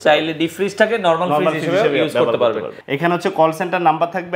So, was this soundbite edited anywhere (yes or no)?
yes